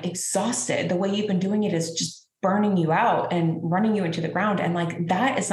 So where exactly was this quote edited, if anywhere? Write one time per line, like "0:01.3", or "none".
none